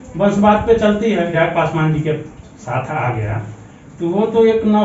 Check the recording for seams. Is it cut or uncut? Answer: cut